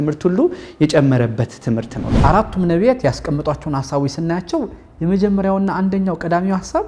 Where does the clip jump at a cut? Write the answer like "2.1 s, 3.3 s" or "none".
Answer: 2.0 s